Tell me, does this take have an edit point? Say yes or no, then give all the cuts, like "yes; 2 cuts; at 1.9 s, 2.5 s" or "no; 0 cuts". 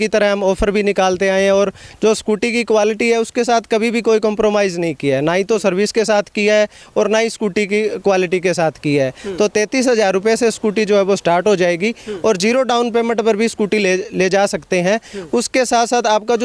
no; 0 cuts